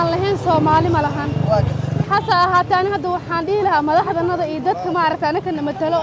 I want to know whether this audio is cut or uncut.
cut